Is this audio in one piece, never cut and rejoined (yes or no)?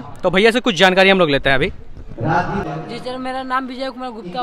yes